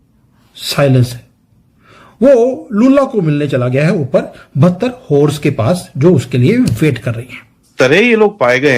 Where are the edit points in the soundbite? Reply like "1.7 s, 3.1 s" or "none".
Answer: 7.7 s